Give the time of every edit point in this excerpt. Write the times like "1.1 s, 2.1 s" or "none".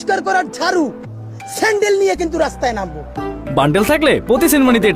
none